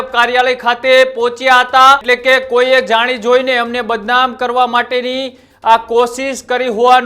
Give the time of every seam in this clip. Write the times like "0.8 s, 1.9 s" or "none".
2.0 s